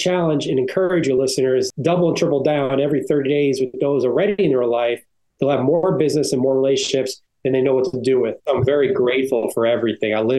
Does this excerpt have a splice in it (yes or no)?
yes